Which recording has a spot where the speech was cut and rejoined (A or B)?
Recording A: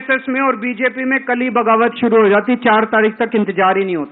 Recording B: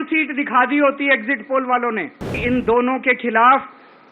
B